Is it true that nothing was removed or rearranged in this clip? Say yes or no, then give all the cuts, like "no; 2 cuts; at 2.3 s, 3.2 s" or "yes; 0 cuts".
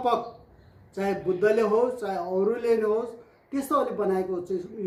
yes; 0 cuts